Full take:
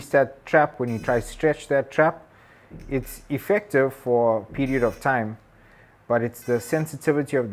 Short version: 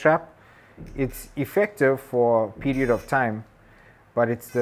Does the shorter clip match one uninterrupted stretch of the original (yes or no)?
yes